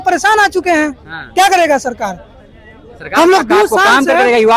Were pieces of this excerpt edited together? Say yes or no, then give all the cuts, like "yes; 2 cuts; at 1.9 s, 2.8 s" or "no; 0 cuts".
no; 0 cuts